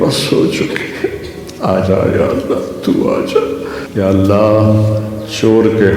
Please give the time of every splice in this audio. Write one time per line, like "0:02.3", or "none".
0:03.8

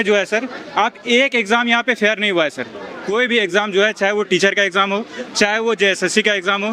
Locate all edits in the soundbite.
none

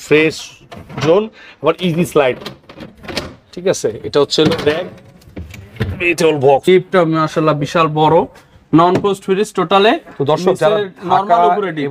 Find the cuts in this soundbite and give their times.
0:06.7

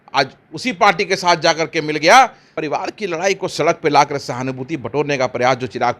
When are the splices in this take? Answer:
0:02.5

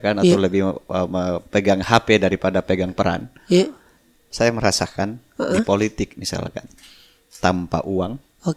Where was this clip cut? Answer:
0:04.3

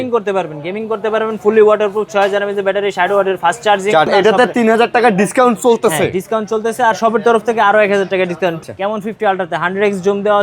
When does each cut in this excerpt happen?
0:04.1
0:08.6

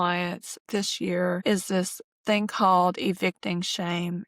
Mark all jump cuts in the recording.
0:01.8

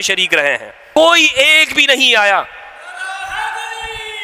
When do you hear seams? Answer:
0:01.0

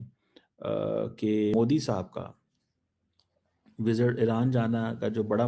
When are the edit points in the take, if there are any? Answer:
0:01.5

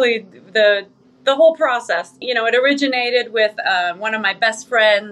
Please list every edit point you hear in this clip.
0:02.2

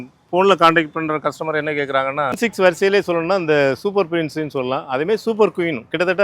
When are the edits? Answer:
0:02.3

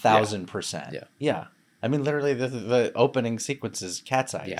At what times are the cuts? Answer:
none

